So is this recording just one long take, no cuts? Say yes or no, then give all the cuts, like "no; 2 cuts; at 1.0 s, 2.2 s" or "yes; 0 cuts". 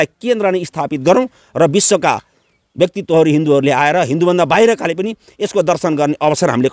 yes; 0 cuts